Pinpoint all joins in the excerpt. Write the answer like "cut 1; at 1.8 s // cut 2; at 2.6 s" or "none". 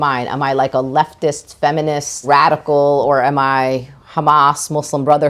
cut 1; at 2.2 s